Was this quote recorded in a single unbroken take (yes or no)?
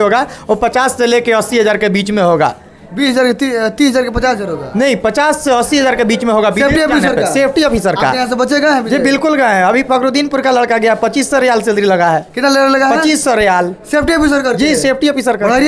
yes